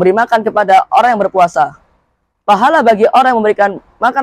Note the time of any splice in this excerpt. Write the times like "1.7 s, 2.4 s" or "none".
none